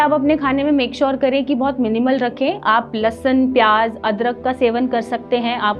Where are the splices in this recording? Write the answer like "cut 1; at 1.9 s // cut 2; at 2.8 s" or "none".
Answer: none